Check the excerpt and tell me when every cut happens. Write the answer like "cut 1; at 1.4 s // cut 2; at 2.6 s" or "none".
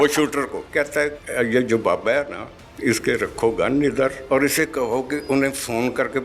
cut 1; at 0.9 s // cut 2; at 4.2 s